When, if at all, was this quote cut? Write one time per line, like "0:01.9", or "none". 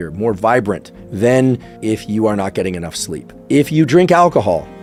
none